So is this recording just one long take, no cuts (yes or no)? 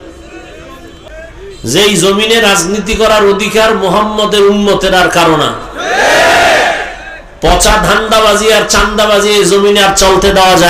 no